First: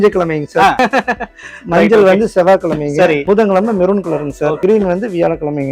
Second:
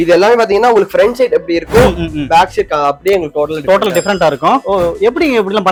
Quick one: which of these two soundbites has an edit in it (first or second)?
first